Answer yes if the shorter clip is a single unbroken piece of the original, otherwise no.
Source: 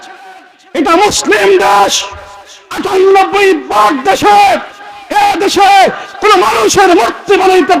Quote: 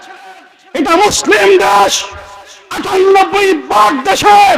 yes